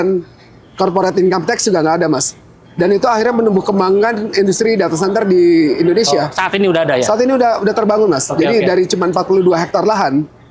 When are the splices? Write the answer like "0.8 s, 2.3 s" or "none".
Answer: none